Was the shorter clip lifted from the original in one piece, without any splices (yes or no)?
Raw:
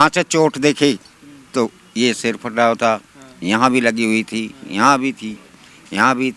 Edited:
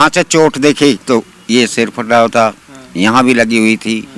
no